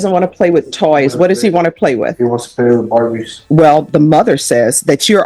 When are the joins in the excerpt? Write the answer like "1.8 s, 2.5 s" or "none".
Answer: 3.3 s